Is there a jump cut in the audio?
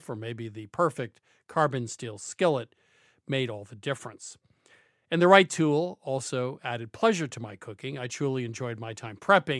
no; 0 cuts

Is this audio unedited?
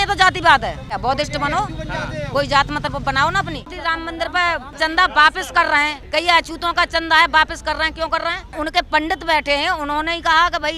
no; 5 cuts; at 0.9 s, 3.6 s, 4.8 s, 6.0 s, 8.5 s

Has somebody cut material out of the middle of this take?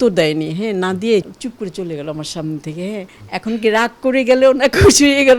yes; 2 cuts; at 1.3 s, 3.2 s

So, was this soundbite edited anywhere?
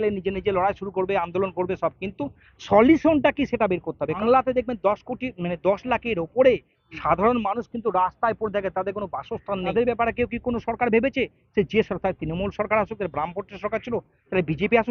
yes; 2 cuts; at 4.2 s, 9.7 s

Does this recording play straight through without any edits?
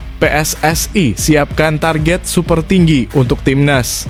yes; 0 cuts

